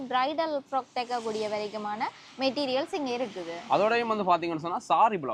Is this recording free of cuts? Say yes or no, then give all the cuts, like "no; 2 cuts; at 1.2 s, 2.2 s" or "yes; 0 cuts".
yes; 0 cuts